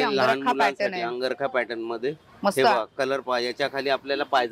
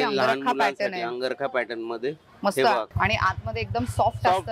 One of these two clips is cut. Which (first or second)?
second